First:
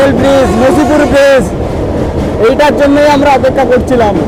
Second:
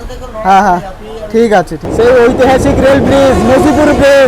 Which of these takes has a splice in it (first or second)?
second